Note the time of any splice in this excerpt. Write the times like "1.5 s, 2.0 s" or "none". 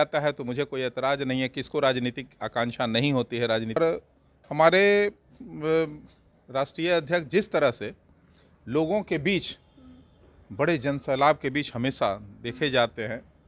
3.8 s